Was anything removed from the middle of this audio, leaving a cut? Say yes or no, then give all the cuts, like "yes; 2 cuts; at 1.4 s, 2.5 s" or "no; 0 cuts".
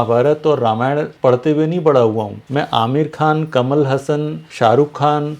yes; 3 cuts; at 1.1 s, 2.4 s, 4.4 s